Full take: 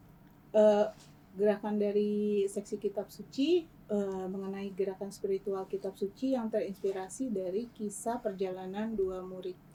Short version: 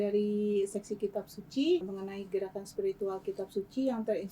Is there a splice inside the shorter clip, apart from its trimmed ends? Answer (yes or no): yes